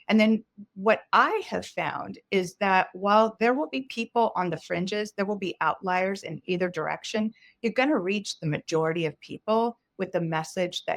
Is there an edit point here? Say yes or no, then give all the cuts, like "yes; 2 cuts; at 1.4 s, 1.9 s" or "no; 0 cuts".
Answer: no; 0 cuts